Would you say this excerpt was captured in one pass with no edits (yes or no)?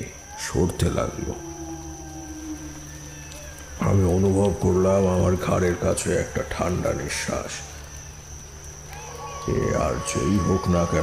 no